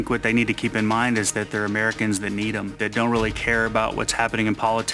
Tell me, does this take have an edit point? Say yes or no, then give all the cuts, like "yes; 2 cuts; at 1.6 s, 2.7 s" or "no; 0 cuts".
yes; 1 cut; at 2.7 s